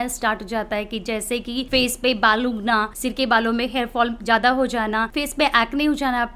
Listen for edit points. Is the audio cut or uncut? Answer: cut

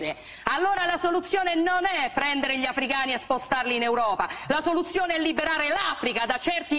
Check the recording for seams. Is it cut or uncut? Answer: uncut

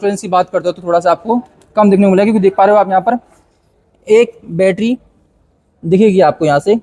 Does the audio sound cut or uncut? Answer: uncut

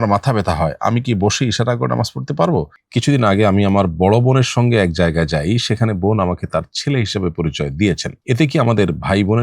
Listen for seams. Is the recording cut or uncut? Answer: cut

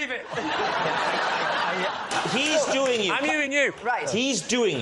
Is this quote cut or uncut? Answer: cut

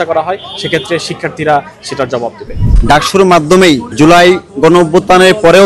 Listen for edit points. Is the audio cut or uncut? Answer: cut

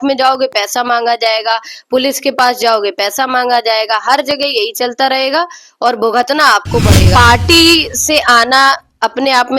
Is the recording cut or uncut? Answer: cut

